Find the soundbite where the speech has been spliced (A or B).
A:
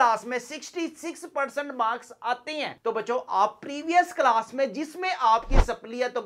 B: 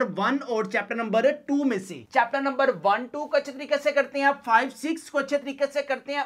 B